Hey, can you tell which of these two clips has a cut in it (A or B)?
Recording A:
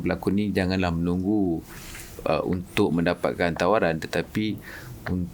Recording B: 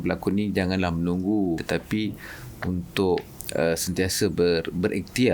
B